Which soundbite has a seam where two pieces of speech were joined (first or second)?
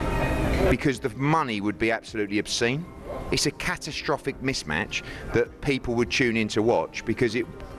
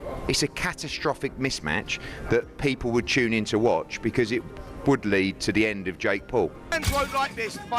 second